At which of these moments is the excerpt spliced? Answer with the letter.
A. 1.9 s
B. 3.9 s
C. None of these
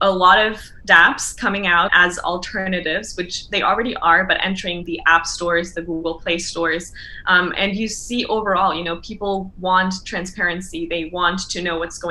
A